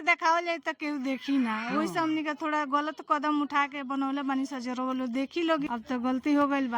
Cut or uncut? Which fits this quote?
cut